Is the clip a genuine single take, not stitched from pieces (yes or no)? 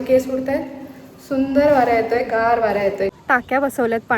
no